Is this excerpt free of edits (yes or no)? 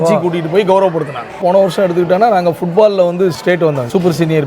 no